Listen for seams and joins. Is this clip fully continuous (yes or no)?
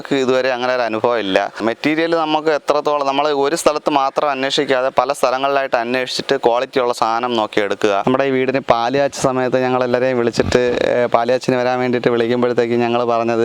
no